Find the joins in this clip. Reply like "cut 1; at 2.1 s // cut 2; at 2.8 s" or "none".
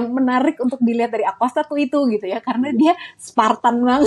none